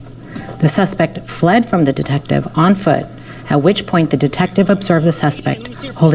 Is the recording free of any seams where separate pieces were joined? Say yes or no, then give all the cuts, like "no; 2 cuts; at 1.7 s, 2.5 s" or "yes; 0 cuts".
yes; 0 cuts